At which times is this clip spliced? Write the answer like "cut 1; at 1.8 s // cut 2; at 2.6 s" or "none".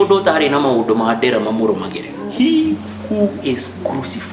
cut 1; at 2.3 s